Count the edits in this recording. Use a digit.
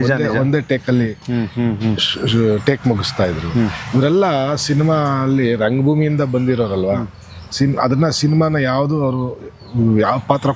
0